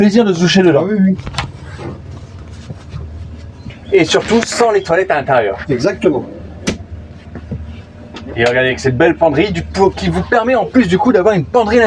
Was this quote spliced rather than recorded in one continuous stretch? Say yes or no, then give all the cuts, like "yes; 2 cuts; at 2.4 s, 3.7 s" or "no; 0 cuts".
no; 0 cuts